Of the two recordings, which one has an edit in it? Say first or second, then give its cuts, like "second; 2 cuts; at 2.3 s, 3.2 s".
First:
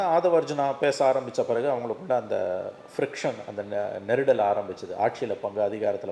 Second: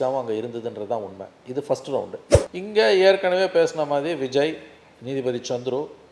second; 1 cut; at 2.3 s